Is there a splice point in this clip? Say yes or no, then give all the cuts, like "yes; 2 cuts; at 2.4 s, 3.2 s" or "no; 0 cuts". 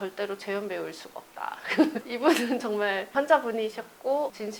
no; 0 cuts